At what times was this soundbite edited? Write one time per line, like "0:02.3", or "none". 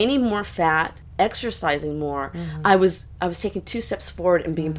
none